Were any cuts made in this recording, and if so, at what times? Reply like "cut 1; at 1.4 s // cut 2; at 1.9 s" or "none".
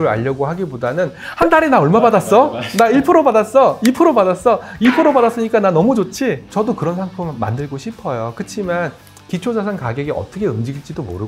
cut 1; at 6.5 s

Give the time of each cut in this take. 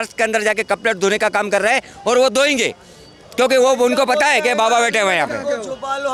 none

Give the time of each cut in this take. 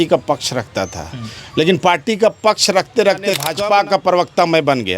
cut 1; at 3.6 s

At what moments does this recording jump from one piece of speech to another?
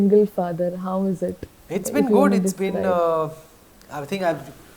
none

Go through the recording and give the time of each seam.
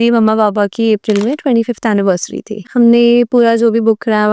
cut 1; at 2.7 s

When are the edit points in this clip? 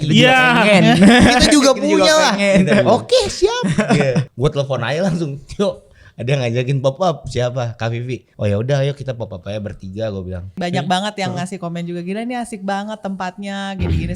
cut 1; at 4.3 s // cut 2; at 8.2 s // cut 3; at 10.5 s

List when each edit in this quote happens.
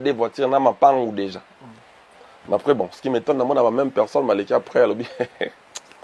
none

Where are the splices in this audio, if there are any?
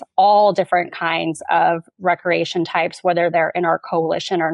none

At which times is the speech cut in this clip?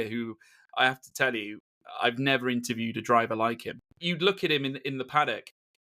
cut 1; at 4.0 s

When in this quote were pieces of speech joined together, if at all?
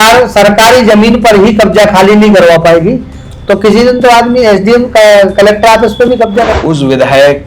cut 1; at 6.5 s

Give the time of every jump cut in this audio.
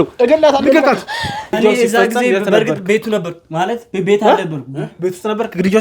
cut 1; at 1.5 s

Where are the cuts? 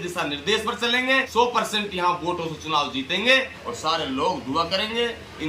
cut 1; at 1.3 s // cut 2; at 3.6 s

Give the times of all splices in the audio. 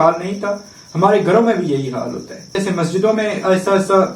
cut 1; at 2.6 s

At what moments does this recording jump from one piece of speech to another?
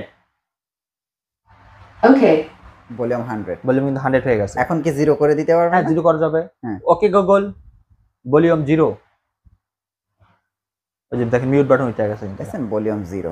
none

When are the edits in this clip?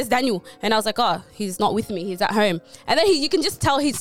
none

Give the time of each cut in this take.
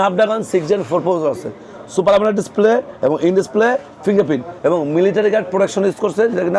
none

